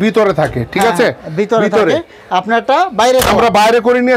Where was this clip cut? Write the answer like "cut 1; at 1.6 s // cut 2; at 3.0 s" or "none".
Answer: none